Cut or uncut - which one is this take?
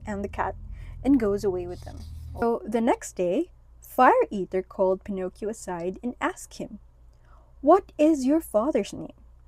cut